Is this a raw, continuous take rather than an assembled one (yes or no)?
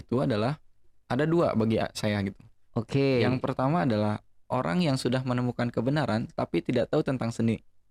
yes